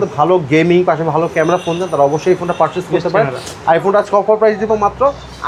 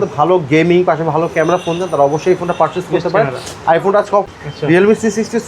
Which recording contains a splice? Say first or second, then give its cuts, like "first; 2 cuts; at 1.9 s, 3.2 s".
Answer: second; 1 cut; at 4.3 s